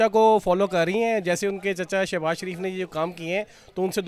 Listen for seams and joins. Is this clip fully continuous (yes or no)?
yes